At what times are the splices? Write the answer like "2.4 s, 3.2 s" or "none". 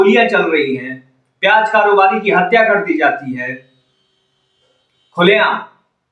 none